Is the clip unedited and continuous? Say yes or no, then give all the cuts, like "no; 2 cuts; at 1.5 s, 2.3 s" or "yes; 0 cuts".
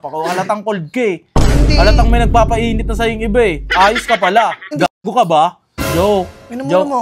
no; 1 cut; at 4.7 s